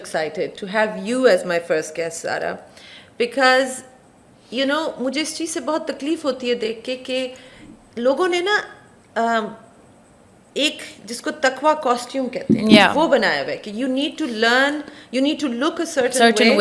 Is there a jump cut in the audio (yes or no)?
no